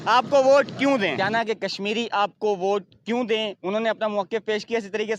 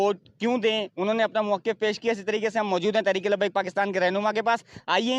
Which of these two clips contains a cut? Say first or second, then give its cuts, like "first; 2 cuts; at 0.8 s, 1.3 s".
first; 1 cut; at 1.2 s